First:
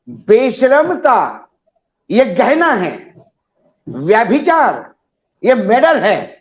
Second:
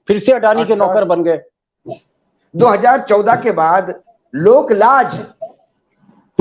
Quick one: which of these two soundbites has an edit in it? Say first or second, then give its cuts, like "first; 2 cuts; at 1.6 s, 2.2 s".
second; 2 cuts; at 2.1 s, 4.0 s